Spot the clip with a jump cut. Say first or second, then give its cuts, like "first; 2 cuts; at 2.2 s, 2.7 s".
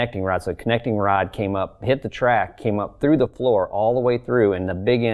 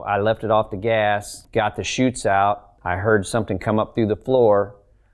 second; 2 cuts; at 1.4 s, 2.7 s